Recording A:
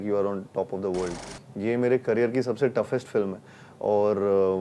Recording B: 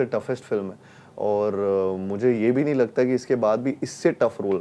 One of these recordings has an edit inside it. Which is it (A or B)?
A